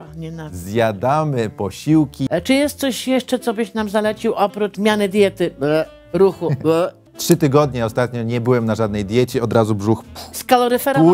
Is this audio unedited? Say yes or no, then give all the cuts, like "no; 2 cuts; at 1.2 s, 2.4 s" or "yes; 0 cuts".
no; 3 cuts; at 2.2 s, 4.7 s, 7.1 s